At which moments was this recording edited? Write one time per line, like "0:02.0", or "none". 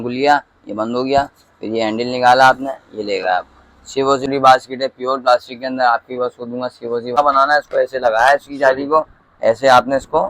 0:04.2
0:07.2